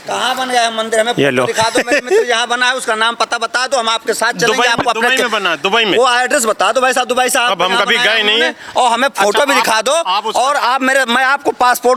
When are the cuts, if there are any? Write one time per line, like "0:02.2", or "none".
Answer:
none